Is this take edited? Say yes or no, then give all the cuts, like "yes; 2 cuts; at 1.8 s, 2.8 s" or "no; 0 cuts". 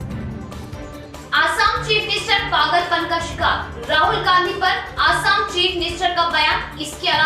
yes; 1 cut; at 0.9 s